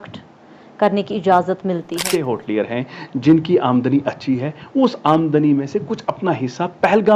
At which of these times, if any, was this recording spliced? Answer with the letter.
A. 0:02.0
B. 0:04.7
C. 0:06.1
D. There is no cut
A